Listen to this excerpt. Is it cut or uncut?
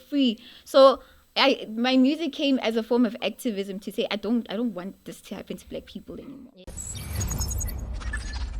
cut